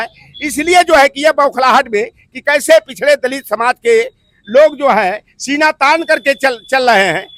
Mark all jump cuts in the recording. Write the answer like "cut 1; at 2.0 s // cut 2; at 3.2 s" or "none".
none

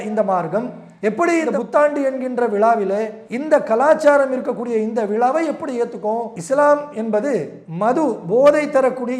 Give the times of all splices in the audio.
cut 1; at 6.3 s

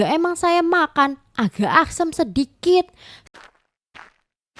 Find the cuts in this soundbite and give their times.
cut 1; at 3.5 s

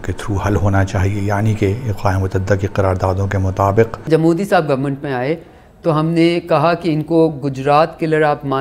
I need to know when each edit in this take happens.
cut 1; at 4.1 s

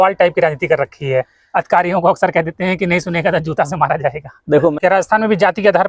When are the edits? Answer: cut 1; at 4.7 s

